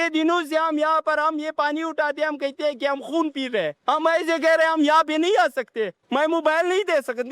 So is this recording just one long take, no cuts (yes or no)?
no